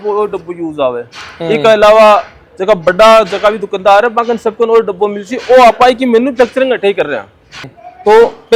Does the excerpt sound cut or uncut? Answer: uncut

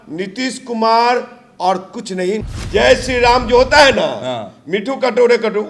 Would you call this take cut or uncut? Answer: cut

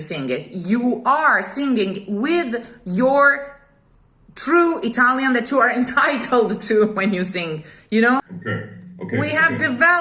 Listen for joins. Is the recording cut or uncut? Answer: cut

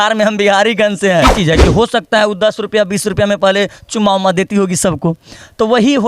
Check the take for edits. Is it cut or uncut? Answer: cut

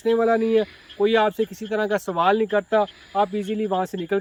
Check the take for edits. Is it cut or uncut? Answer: uncut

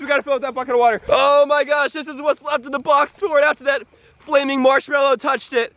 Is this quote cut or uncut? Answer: cut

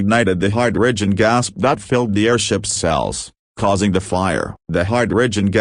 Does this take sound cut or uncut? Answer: cut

